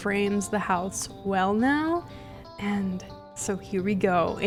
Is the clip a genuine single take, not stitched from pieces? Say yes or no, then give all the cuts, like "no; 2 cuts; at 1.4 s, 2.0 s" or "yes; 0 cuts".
yes; 0 cuts